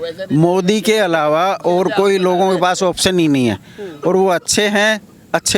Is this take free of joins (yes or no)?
yes